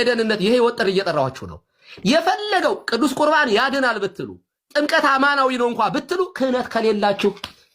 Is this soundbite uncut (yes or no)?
no